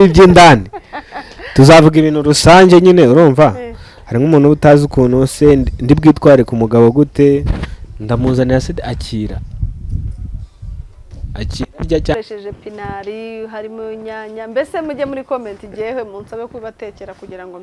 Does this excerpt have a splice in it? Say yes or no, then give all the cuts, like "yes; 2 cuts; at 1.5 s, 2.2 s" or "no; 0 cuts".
yes; 1 cut; at 12.1 s